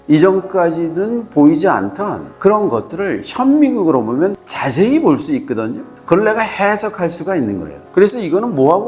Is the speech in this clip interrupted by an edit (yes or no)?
yes